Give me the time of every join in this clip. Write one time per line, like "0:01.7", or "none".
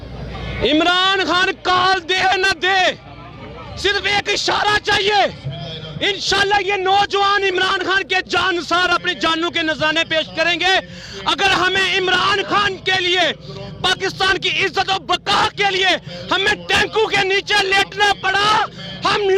none